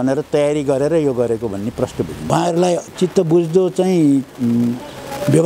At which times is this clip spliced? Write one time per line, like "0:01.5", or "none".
0:02.3